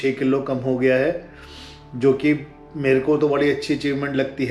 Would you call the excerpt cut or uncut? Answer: uncut